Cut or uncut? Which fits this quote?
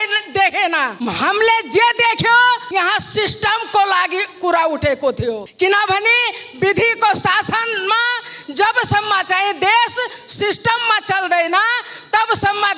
cut